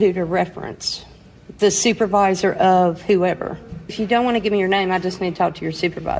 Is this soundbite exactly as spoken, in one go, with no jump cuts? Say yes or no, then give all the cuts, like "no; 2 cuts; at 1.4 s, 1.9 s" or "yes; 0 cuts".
no; 1 cut; at 3.9 s